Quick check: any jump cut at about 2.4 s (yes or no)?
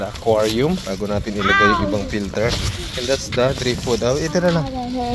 no